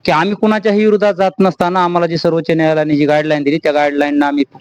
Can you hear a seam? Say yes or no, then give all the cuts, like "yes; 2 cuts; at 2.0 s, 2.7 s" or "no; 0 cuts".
no; 0 cuts